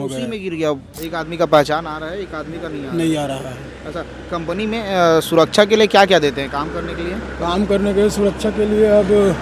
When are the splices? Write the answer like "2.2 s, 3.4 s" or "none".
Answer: 0.9 s